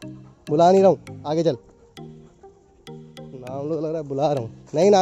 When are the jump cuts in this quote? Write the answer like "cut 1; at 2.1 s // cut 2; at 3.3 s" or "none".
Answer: cut 1; at 1.6 s // cut 2; at 3.3 s